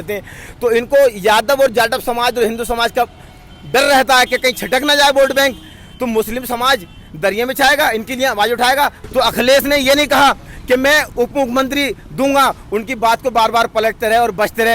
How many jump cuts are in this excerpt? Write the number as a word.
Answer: one